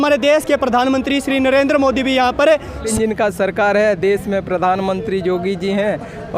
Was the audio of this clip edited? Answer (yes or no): yes